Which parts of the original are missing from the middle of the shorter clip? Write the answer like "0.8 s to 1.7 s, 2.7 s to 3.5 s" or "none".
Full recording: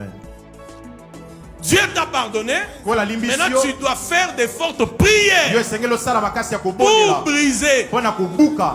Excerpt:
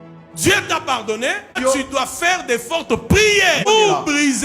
2.8 s to 3.4 s, 5.5 s to 6.8 s